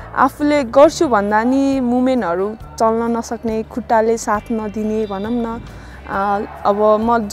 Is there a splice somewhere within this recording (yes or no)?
no